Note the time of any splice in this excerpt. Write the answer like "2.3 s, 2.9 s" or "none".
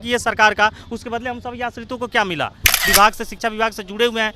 2.8 s